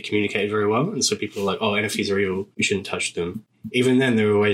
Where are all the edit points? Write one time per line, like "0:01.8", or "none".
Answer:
0:02.5
0:03.5